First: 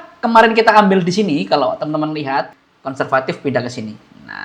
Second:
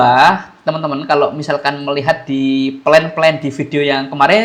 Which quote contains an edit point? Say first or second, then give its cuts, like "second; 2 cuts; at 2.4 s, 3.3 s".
first; 1 cut; at 2.5 s